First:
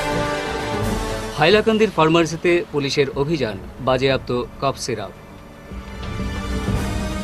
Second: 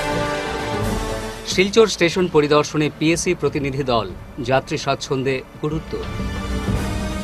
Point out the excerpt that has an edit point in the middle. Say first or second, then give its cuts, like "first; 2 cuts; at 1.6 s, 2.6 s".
first; 1 cut; at 0.9 s